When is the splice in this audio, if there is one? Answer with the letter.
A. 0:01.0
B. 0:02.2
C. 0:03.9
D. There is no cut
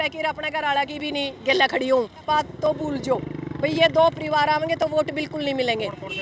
B